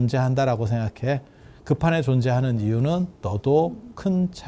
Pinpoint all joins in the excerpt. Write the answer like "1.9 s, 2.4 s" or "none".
none